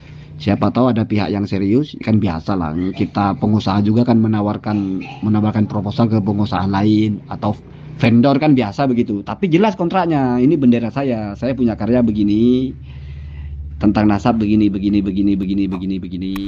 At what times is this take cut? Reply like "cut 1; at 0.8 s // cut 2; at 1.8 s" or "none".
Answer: none